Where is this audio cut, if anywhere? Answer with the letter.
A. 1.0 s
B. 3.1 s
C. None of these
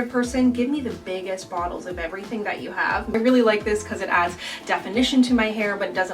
B